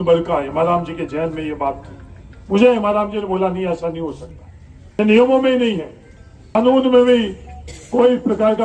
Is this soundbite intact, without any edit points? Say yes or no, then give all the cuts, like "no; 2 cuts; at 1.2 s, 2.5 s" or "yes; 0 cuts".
no; 2 cuts; at 5.0 s, 6.5 s